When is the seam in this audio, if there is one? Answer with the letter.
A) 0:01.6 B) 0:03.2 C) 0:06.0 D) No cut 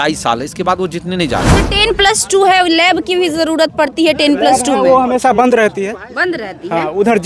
A